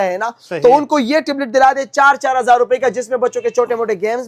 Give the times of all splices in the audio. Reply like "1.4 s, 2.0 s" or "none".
none